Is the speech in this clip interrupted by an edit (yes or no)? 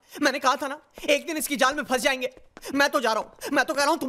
no